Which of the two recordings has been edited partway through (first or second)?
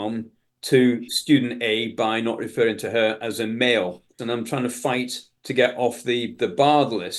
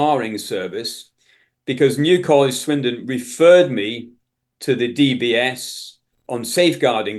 first